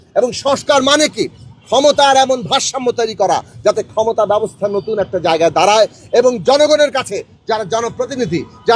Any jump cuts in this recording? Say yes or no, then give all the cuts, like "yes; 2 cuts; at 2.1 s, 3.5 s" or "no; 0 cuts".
no; 0 cuts